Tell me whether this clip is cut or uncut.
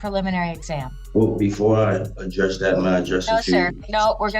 cut